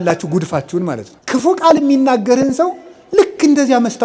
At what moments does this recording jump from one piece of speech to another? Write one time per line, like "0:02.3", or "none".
0:01.1